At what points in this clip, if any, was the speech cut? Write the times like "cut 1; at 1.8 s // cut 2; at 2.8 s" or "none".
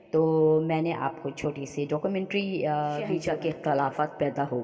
cut 1; at 3.2 s